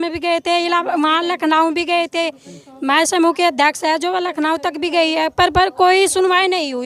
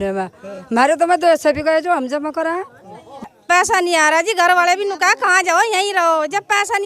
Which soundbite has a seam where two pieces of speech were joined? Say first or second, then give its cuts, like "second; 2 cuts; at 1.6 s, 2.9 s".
second; 1 cut; at 3.3 s